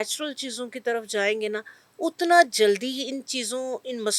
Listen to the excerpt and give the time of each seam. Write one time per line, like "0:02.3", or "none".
none